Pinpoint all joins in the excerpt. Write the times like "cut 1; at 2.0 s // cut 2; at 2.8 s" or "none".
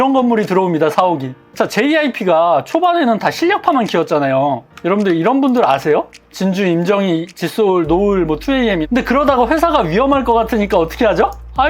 cut 1; at 1.4 s // cut 2; at 8.8 s